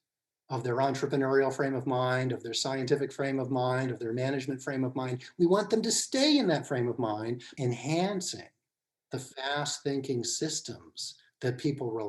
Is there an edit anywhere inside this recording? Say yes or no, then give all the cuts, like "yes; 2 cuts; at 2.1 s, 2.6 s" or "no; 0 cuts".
yes; 1 cut; at 7.5 s